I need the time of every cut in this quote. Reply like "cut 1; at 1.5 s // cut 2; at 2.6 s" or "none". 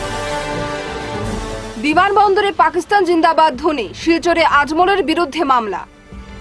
cut 1; at 1.6 s